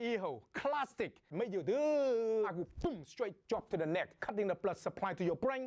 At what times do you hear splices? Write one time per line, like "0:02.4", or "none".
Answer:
0:02.5

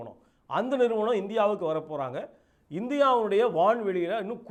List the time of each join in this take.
none

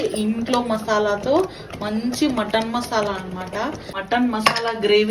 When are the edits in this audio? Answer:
0:03.9

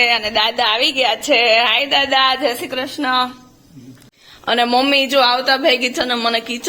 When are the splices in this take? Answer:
0:04.2

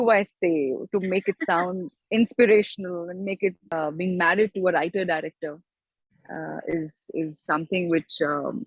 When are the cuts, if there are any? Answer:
0:03.6

